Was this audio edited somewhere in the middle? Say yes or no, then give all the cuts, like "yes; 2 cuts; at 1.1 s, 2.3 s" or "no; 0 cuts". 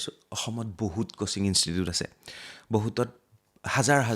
no; 0 cuts